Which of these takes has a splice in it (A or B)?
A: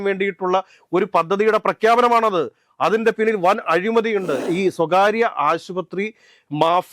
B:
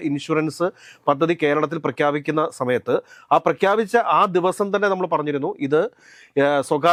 A